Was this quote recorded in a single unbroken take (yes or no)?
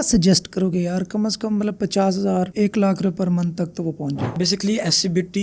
no